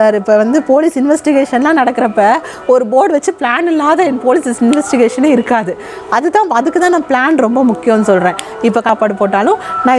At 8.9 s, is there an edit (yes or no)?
yes